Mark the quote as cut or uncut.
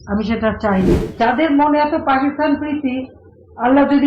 cut